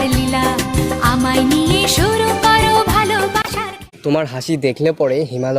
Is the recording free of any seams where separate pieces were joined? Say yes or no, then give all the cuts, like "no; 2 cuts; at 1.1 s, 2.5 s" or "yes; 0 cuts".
no; 1 cut; at 3.9 s